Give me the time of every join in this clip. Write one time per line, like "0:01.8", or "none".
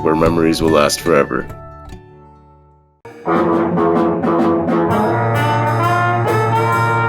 0:02.9